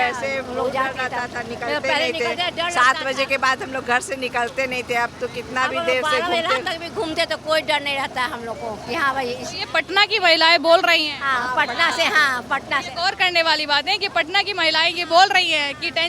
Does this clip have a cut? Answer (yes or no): no